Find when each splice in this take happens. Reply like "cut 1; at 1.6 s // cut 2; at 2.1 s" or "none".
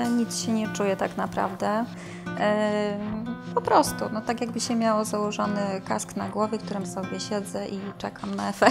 none